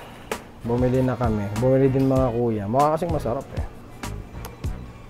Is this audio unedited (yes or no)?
yes